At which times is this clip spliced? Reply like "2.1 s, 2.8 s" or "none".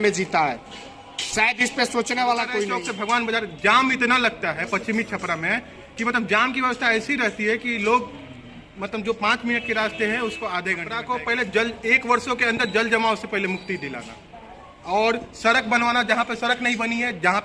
2.8 s, 10.9 s